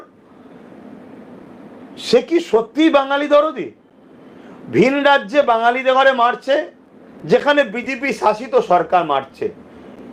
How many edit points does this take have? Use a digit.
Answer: 0